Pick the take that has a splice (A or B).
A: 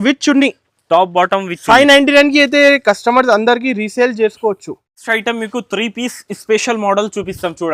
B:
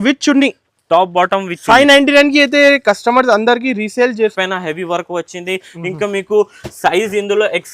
B